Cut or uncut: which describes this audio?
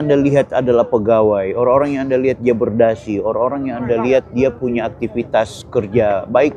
uncut